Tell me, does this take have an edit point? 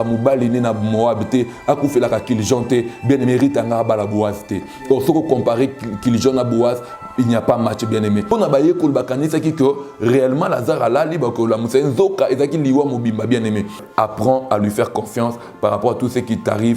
yes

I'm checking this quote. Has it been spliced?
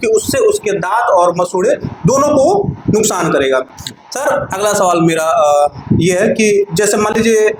no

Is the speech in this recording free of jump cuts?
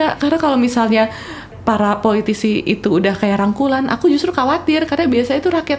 yes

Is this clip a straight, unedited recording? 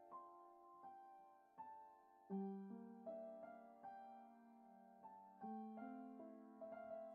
yes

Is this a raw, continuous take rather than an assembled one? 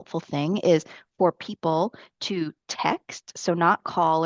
yes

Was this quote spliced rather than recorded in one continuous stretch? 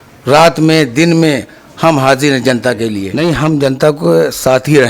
yes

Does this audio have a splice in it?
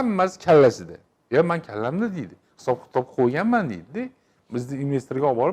no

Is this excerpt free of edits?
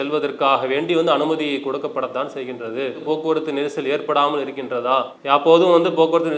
no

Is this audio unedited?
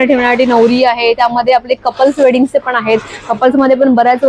yes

